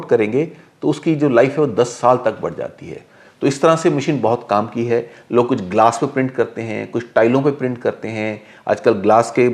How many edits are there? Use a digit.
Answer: 0